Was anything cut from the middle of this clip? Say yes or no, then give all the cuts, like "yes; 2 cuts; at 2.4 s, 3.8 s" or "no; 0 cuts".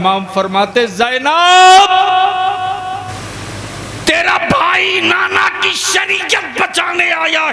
yes; 1 cut; at 3.2 s